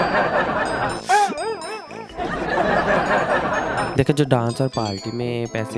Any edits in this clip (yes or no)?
no